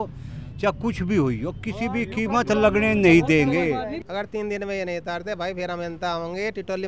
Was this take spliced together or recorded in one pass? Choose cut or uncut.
cut